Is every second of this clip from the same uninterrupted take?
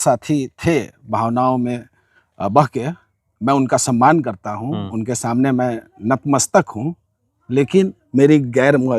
yes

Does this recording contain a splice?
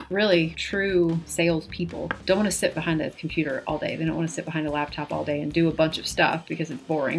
no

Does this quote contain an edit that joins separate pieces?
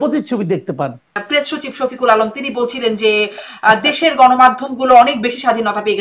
yes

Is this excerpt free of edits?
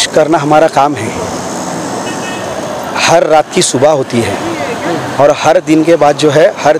yes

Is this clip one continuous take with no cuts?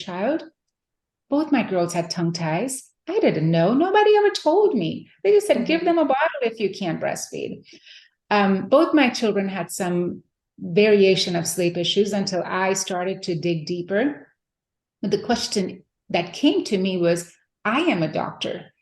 no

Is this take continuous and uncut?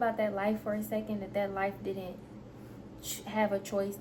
yes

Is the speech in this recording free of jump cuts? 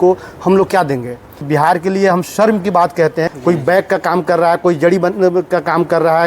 no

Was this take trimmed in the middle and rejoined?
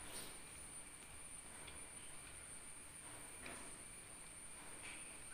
no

